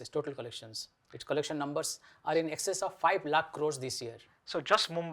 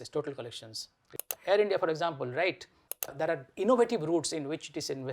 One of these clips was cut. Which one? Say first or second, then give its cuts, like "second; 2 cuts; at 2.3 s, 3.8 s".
second; 2 cuts; at 1.2 s, 3.1 s